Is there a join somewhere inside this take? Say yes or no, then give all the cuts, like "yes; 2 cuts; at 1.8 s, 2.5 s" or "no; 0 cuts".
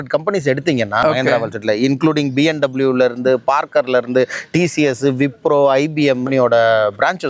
yes; 2 cuts; at 1.0 s, 6.2 s